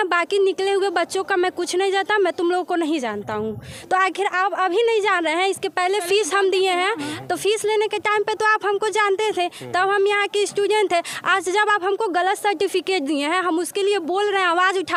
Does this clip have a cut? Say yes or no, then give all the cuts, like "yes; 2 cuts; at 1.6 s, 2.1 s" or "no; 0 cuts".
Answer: no; 0 cuts